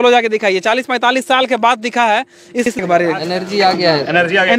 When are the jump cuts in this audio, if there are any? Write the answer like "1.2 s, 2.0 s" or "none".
2.8 s